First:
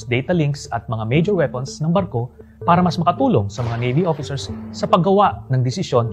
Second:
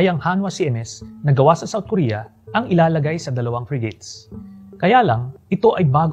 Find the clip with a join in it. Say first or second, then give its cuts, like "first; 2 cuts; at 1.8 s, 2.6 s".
second; 1 cut; at 4.6 s